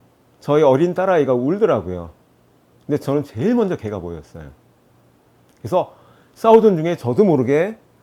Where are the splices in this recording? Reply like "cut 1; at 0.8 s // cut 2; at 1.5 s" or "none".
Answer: none